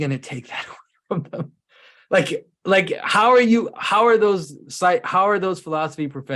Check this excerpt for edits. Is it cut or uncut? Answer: uncut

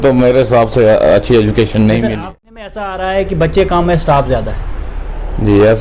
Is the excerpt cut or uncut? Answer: cut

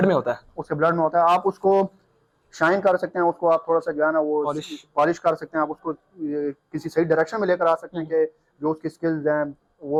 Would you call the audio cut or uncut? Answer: uncut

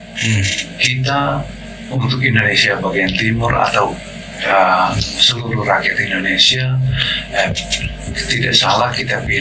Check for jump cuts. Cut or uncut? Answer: uncut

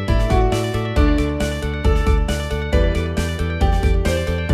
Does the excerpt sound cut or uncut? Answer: uncut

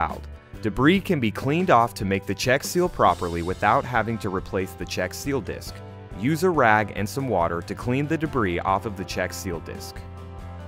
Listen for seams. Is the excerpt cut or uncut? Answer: cut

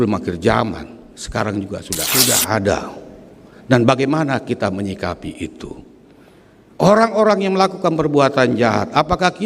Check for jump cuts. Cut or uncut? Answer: cut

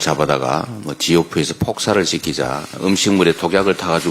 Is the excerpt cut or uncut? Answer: cut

